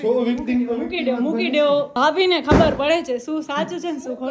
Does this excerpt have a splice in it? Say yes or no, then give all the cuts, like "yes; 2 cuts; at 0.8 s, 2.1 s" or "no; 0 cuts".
yes; 1 cut; at 1.9 s